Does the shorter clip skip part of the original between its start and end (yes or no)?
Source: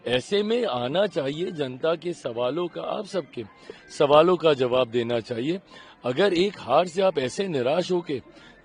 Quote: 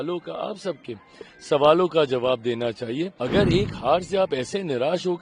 yes